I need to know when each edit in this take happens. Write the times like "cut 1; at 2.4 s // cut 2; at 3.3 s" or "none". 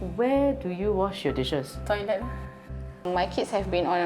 cut 1; at 2.4 s

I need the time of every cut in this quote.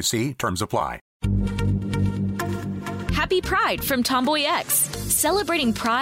cut 1; at 1.1 s

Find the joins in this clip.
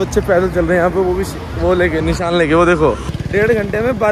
cut 1; at 3.1 s

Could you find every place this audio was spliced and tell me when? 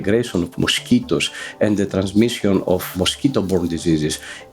cut 1; at 2.9 s

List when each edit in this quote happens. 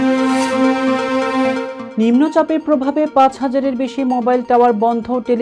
cut 1; at 1.8 s

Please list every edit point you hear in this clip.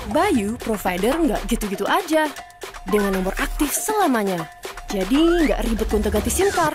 none

